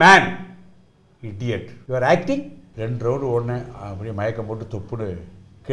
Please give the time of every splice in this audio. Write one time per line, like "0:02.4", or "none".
0:01.7
0:02.6